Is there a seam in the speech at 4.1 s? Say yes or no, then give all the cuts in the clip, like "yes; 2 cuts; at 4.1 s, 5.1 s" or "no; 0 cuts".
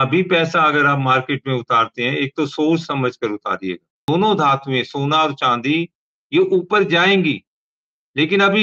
yes; 1 cut; at 4.1 s